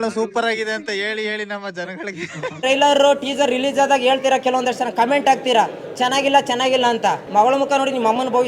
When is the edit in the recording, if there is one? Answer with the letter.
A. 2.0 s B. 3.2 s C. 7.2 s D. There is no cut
C